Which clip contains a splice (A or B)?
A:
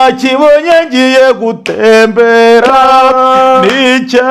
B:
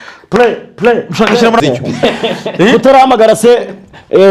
B